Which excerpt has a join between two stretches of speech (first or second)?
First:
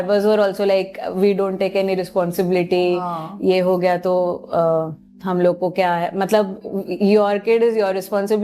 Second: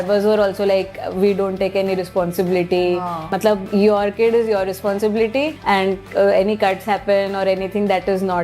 second